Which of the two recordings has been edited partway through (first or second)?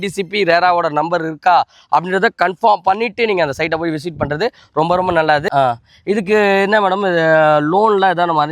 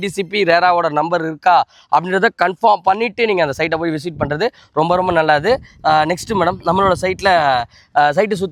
first